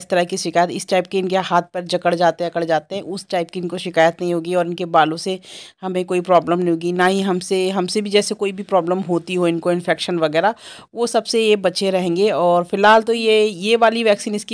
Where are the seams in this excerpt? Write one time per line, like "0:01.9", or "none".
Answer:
none